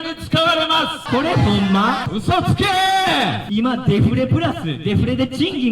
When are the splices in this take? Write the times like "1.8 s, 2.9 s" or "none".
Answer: 1.0 s, 2.1 s, 3.4 s

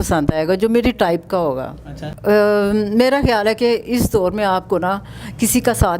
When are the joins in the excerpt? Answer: 2.1 s

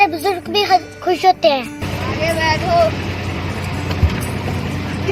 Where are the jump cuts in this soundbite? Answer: 1.8 s

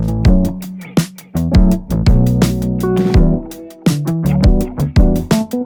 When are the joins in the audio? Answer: none

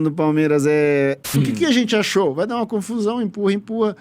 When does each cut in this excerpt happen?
1.2 s

